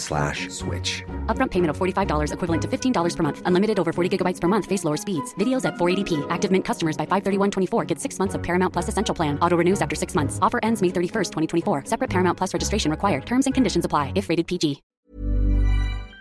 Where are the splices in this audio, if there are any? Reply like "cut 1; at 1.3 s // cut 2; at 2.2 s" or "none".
cut 1; at 14.9 s